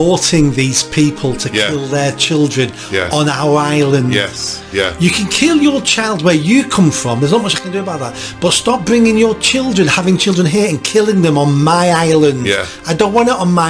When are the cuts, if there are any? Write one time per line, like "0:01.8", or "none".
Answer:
none